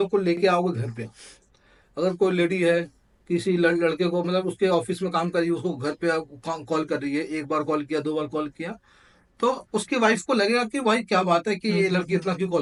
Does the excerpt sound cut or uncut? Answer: uncut